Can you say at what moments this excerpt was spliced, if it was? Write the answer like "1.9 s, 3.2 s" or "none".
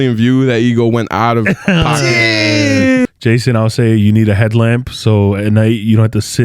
3.0 s

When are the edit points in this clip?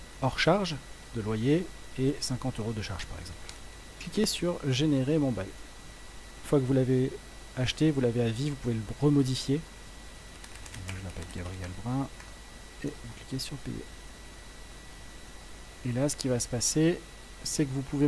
4.3 s, 6.4 s, 10.3 s

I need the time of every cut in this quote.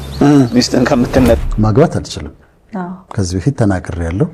1.5 s

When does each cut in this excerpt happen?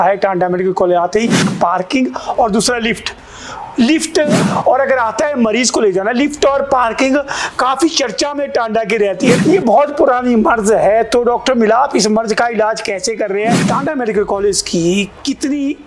1.5 s, 4.4 s, 9.4 s, 13.6 s

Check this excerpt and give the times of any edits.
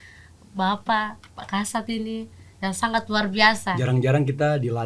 3.7 s

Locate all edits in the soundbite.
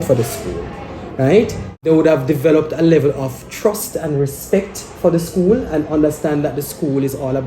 1.8 s

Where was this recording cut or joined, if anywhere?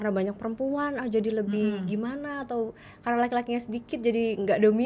none

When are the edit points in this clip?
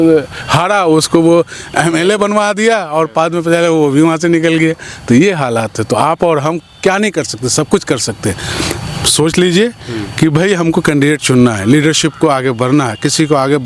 none

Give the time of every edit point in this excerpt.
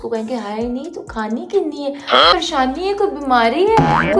2.3 s

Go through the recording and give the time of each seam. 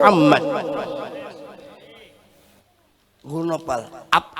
2.6 s

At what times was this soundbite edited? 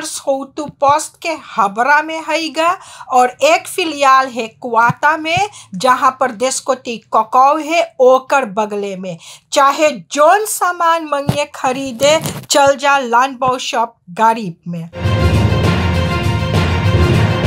15.0 s

